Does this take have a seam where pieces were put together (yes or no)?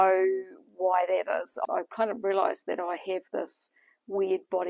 yes